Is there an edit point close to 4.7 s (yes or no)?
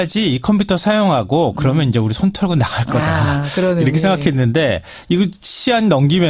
yes